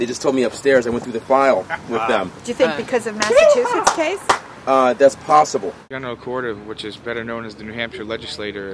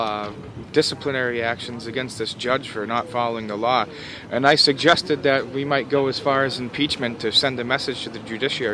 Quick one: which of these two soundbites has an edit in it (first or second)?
first